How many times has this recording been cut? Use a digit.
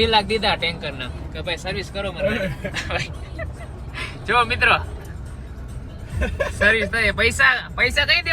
1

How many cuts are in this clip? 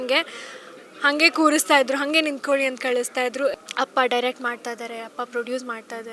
1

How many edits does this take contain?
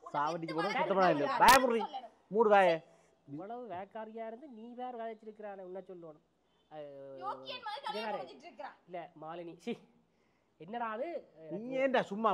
0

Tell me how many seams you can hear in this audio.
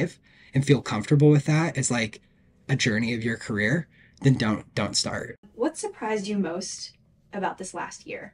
1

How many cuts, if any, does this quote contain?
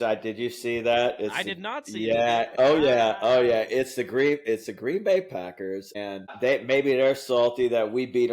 2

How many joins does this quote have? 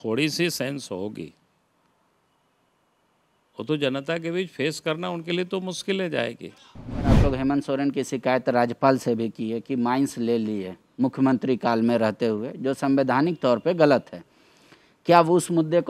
1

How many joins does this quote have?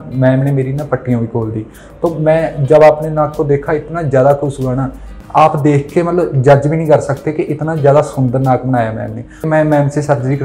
2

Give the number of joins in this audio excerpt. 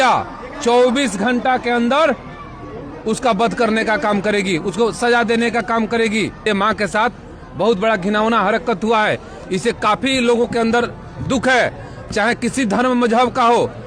1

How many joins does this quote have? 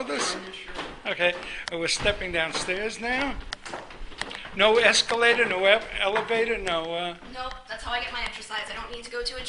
1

